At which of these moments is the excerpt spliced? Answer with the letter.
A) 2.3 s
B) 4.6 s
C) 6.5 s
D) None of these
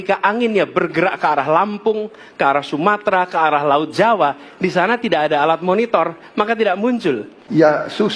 D